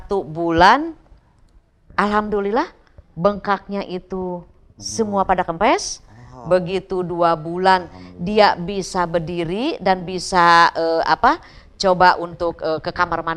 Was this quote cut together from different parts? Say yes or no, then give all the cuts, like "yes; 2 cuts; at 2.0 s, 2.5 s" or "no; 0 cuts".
no; 0 cuts